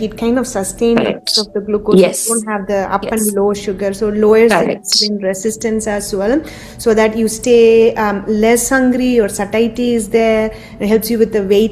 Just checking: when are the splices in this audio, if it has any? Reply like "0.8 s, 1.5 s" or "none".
none